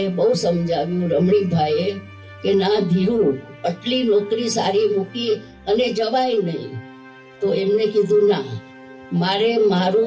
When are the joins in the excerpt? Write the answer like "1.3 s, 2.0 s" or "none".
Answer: none